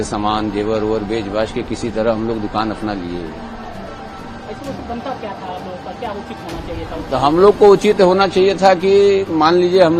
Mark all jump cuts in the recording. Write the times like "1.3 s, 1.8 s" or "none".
none